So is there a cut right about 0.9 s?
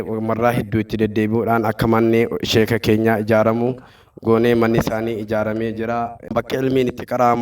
no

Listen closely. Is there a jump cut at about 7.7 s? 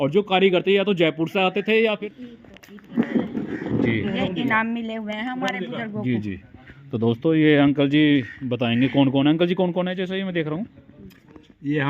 no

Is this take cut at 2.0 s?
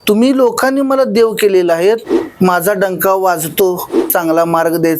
yes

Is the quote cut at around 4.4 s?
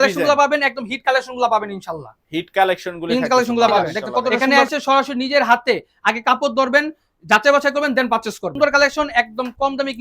yes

